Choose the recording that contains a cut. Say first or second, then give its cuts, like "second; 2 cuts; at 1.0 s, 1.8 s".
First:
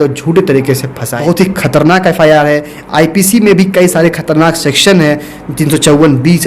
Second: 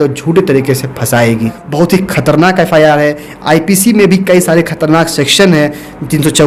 first; 1 cut; at 1.1 s